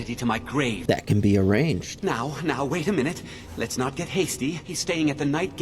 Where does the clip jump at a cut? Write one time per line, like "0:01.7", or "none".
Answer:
0:00.8
0:01.9
0:04.7